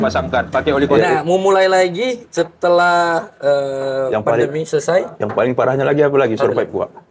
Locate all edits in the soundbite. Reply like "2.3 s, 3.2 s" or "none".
0.9 s